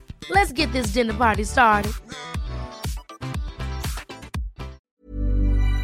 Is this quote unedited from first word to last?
no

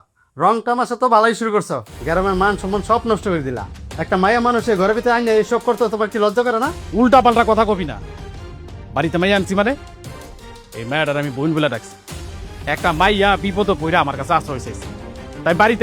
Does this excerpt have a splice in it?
yes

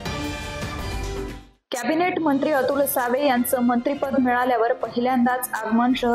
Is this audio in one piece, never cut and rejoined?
yes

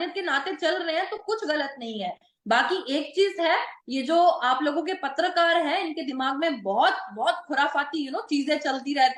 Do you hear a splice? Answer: no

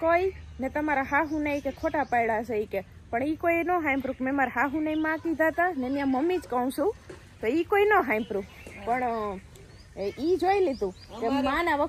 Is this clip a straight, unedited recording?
yes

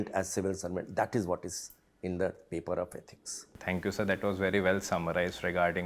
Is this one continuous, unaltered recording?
yes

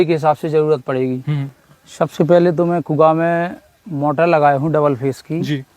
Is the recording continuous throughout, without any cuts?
no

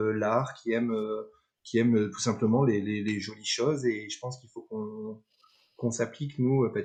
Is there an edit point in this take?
no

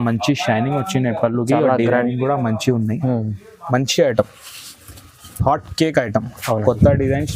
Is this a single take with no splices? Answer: yes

